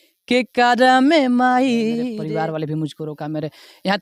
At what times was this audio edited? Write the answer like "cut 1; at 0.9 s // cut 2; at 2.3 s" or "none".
cut 1; at 2.1 s